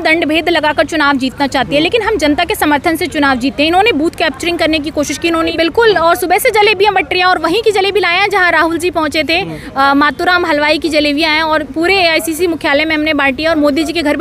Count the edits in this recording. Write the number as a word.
one